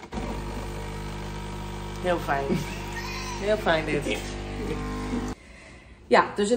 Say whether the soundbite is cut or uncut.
cut